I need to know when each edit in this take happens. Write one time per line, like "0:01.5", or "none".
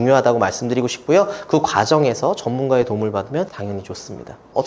none